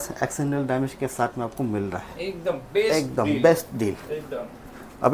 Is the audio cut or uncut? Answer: uncut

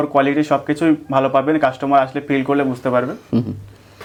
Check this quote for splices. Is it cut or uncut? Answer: uncut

